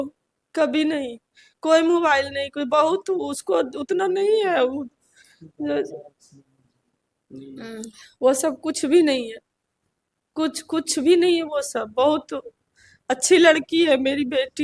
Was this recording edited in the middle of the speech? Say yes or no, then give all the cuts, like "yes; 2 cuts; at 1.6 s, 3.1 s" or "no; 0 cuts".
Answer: no; 0 cuts